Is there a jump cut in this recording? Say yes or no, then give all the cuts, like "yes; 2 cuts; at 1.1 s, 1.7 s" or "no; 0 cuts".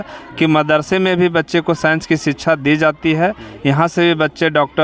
no; 0 cuts